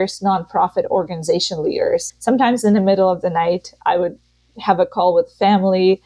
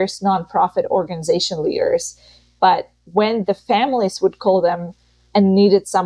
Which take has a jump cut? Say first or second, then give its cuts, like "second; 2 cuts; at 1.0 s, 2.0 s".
first; 1 cut; at 2.1 s